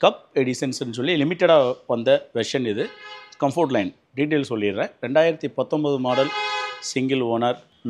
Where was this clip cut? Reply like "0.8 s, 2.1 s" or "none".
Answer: none